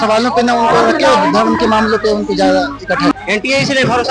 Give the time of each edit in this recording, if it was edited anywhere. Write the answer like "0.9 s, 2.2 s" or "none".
3.1 s